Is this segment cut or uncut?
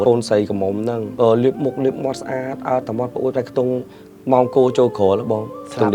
cut